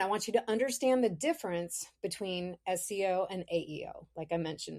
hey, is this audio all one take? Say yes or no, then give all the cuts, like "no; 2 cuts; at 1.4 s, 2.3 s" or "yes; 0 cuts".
yes; 0 cuts